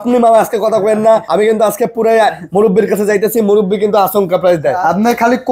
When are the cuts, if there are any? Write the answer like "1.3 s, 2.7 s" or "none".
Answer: 1.3 s, 4.8 s